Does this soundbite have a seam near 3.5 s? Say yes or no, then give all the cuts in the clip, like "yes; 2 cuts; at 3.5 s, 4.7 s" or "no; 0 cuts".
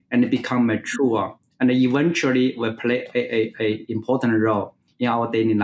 no; 0 cuts